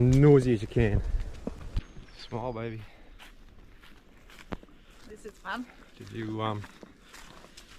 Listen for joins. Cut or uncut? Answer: cut